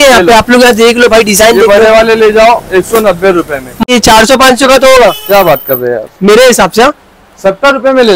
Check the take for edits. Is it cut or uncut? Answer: cut